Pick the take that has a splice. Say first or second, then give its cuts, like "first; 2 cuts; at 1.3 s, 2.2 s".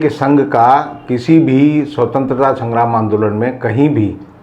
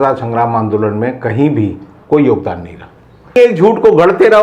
second; 1 cut; at 3.4 s